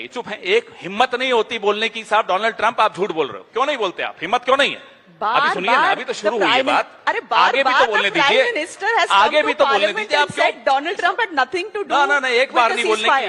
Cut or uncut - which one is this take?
uncut